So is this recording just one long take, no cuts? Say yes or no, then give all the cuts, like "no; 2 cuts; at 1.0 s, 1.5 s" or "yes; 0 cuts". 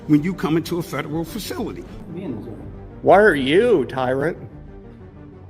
no; 1 cut; at 1.9 s